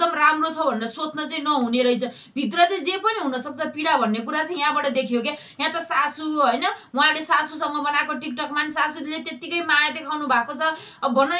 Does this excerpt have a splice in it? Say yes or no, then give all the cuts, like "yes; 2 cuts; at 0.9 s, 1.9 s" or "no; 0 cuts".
no; 0 cuts